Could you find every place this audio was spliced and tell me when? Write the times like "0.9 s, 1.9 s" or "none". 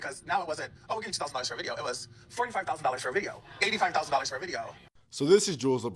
none